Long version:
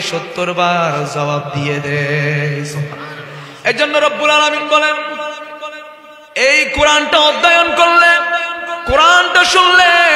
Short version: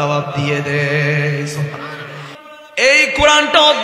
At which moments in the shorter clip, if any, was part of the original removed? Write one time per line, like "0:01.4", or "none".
0:02.3